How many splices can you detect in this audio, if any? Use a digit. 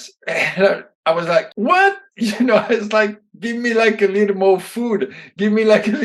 1